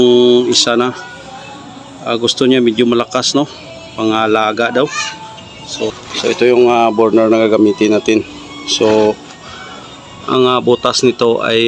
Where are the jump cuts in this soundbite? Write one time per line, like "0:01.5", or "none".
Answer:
0:05.9